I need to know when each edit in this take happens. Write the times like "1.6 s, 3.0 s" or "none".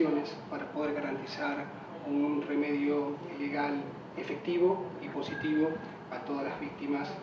5.8 s